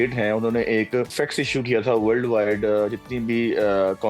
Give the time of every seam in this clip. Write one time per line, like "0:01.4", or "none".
0:01.1